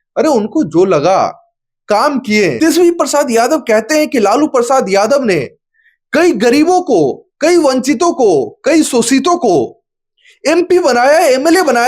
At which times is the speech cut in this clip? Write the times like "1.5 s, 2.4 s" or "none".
2.6 s

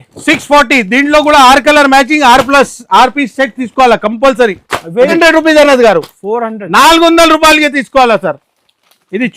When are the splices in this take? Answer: 5.1 s

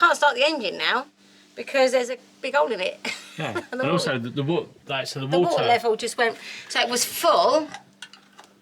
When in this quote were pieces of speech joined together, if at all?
none

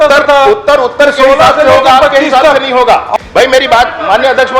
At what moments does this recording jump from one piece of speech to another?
3.1 s

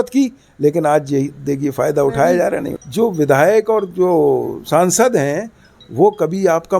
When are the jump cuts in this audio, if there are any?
2.8 s

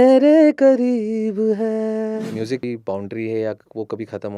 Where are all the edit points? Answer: 2.7 s

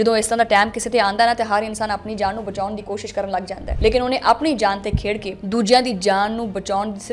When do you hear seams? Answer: none

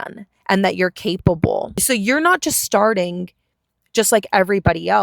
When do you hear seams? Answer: 1.8 s

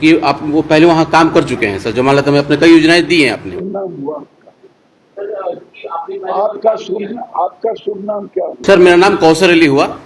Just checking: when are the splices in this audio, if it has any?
3.6 s

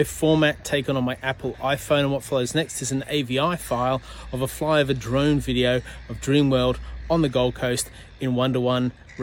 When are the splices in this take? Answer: none

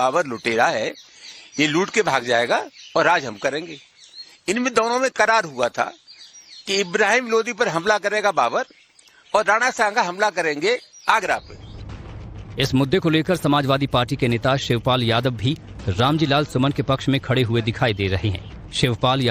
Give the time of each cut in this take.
none

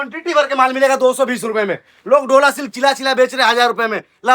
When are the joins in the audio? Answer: none

